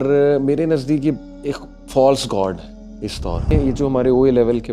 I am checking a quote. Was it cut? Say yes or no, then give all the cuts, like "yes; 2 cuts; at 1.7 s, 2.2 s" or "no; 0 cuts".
yes; 1 cut; at 3.5 s